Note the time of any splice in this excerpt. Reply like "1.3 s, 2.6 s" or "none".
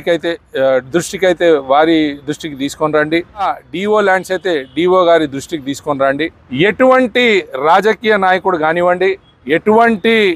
3.6 s, 6.4 s, 9.3 s